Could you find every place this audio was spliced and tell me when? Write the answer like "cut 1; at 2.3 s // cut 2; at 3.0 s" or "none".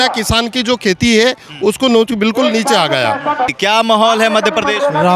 cut 1; at 3.5 s